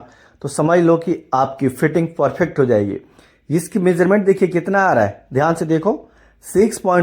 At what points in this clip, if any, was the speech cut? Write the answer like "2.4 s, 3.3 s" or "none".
none